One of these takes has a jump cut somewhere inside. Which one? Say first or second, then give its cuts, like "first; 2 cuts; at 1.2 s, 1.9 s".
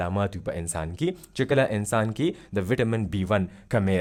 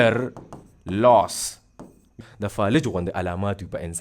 second; 1 cut; at 2.2 s